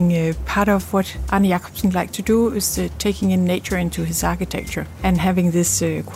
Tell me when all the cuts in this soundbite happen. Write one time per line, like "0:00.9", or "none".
0:01.2
0:04.8